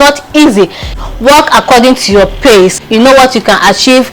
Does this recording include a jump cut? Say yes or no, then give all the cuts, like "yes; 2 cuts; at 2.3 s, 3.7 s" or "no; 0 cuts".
yes; 2 cuts; at 0.8 s, 2.8 s